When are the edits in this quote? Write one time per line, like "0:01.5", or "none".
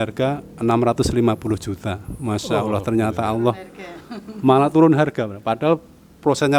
none